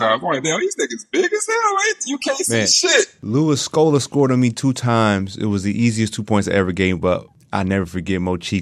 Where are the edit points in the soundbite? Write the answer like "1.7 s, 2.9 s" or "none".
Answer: 3.2 s, 7.4 s